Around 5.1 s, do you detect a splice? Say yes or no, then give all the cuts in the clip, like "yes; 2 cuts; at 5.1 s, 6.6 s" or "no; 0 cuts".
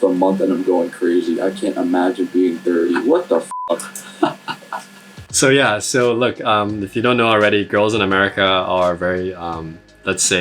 no; 0 cuts